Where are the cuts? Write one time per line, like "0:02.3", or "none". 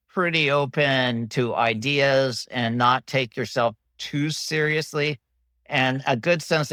none